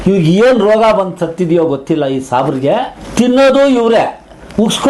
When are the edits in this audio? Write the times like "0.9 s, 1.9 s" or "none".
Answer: 3.0 s

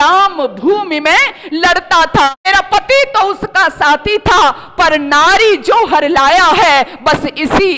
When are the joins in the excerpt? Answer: 2.4 s

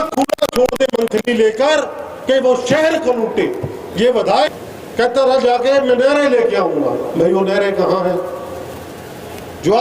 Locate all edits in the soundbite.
4.5 s

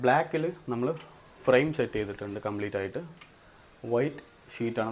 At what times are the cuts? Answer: none

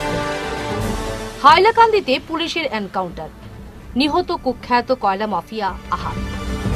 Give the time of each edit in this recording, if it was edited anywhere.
none

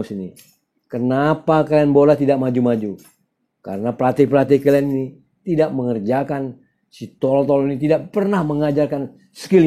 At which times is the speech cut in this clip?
none

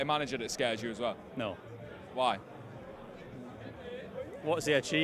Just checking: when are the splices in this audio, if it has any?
none

